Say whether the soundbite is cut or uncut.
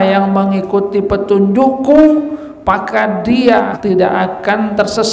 cut